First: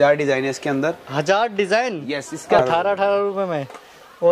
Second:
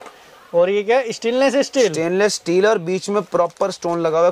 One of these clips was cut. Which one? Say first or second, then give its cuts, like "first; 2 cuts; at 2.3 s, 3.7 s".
first; 1 cut; at 2.6 s